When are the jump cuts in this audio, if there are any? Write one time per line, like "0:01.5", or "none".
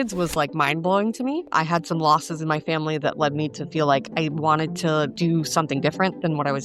0:01.5
0:05.1